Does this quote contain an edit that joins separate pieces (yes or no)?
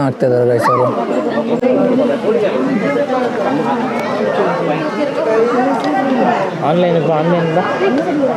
no